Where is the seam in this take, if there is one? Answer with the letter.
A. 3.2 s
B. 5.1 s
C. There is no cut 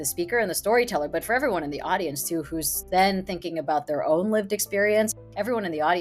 B